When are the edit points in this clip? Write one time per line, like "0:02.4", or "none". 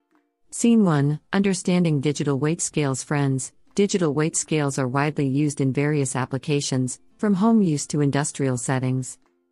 none